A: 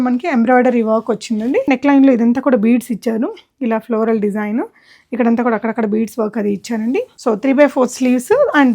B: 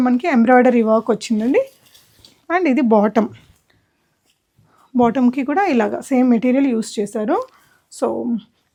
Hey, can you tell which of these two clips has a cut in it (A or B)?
A